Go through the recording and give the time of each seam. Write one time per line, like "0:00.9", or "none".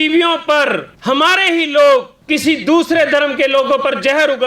0:00.9
0:02.2